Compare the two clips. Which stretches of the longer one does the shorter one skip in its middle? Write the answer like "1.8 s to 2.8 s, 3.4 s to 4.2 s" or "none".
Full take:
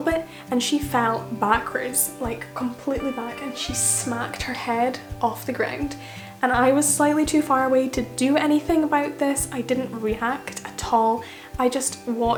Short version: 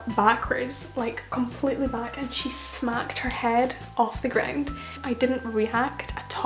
6.2 s to 9.5 s